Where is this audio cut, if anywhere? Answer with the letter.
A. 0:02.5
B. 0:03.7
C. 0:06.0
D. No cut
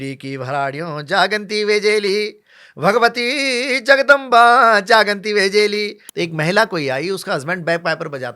C